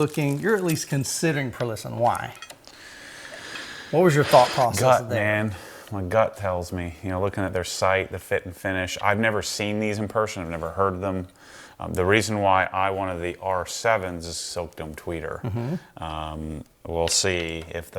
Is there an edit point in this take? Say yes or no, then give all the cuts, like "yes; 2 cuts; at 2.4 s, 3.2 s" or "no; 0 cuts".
no; 0 cuts